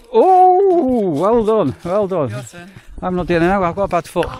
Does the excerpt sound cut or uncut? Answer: uncut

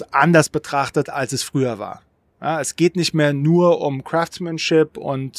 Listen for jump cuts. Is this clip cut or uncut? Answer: uncut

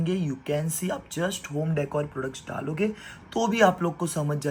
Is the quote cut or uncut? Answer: uncut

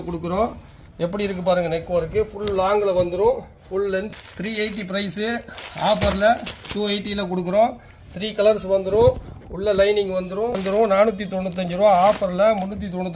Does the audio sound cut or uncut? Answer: cut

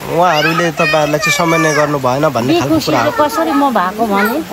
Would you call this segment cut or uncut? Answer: uncut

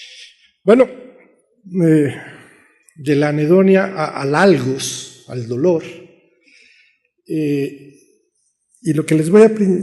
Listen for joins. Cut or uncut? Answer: cut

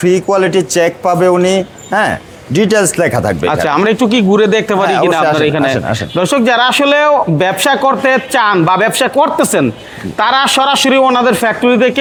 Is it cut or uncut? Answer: uncut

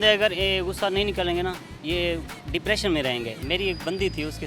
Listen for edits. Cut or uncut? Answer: cut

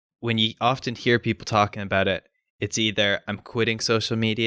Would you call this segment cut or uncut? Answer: uncut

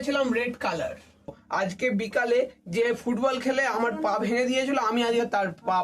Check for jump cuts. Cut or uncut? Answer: cut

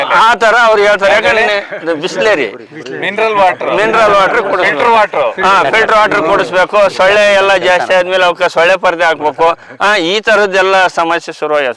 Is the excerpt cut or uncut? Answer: cut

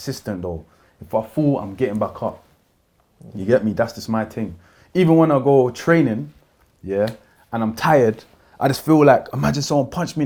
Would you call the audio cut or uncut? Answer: uncut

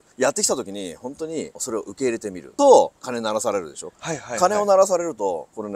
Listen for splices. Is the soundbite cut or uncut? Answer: uncut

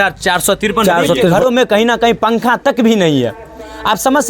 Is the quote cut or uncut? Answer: cut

